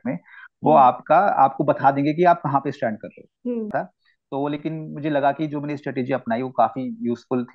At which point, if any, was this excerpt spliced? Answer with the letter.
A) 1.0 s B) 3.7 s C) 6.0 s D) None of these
B